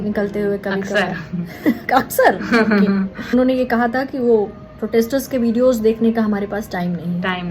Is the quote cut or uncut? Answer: cut